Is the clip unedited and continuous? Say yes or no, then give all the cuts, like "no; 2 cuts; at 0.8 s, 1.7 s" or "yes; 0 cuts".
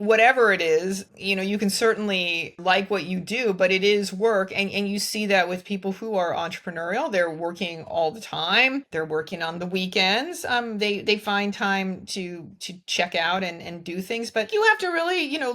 no; 4 cuts; at 1.1 s, 2.6 s, 8.9 s, 14.5 s